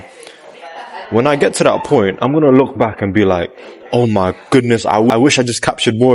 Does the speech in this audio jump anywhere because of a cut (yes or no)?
yes